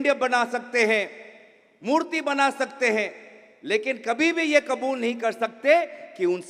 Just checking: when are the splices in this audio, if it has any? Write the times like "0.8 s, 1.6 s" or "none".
none